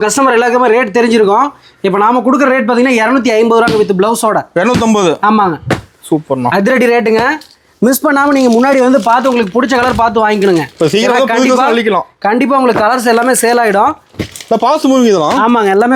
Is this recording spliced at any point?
no; 0 cuts

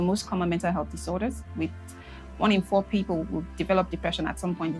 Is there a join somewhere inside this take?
no; 0 cuts

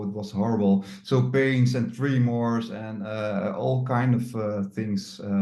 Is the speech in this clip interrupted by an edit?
no; 0 cuts

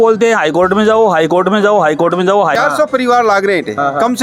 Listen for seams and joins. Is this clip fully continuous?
no; 1 cut; at 2.6 s

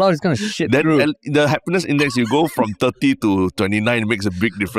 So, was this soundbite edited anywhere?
no; 0 cuts

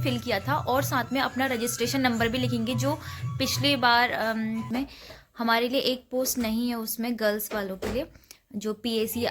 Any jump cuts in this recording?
yes; 1 cut; at 4.7 s

